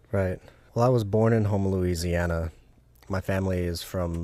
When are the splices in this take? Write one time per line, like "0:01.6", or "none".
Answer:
0:02.9